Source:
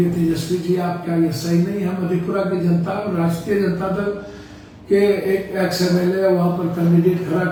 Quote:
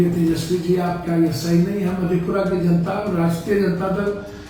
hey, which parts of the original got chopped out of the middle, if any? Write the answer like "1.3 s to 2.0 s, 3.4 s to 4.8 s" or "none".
none